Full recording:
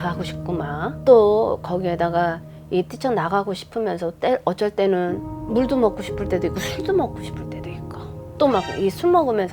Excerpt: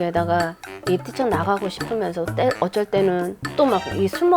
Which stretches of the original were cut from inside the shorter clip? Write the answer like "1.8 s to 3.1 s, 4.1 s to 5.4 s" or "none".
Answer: 5.2 s to 8.2 s